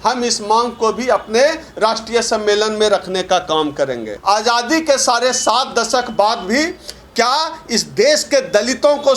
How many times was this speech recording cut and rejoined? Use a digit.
1